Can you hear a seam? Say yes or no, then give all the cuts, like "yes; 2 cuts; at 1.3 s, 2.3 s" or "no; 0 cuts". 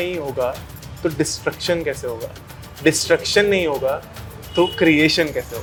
no; 0 cuts